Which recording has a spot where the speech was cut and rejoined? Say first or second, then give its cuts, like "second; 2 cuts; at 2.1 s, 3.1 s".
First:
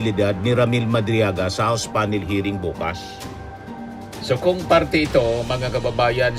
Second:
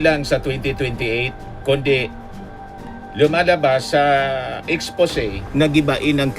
second; 1 cut; at 5.5 s